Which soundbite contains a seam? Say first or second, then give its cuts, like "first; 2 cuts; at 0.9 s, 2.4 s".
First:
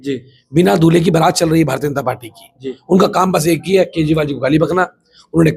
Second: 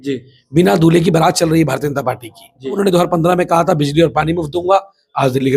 second; 1 cut; at 2.7 s